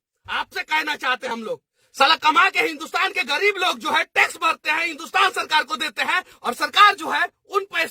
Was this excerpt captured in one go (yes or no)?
no